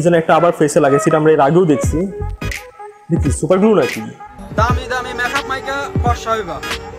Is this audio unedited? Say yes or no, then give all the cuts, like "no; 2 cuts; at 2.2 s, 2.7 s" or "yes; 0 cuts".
no; 1 cut; at 4.3 s